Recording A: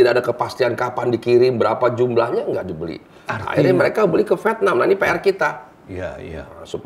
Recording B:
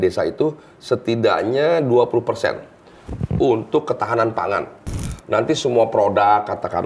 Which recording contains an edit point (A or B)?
B